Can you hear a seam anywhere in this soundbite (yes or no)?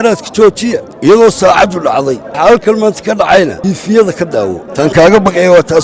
yes